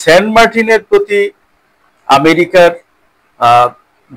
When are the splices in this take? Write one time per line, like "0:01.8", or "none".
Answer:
none